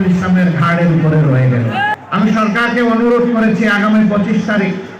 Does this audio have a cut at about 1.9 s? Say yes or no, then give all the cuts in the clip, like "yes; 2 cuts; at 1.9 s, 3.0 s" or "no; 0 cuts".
yes; 1 cut; at 1.9 s